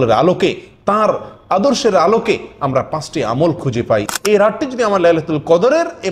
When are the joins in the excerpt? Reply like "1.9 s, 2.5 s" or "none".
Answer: 4.1 s